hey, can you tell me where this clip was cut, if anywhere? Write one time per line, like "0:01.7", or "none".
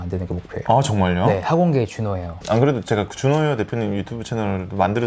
0:02.2